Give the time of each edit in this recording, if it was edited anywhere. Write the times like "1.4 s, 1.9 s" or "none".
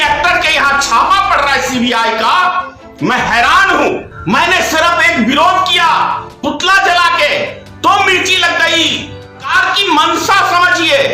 4.1 s, 9.5 s